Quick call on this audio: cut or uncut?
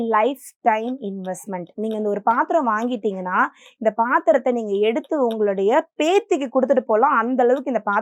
uncut